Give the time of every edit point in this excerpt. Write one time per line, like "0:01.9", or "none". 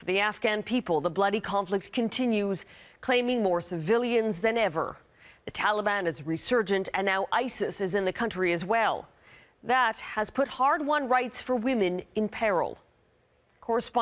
none